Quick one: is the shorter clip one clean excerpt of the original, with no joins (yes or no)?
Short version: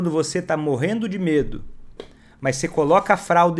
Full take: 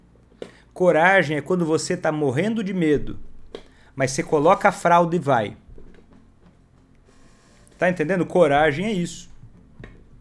yes